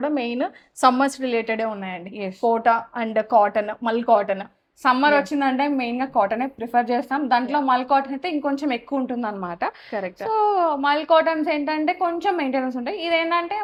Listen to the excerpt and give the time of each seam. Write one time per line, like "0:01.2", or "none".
none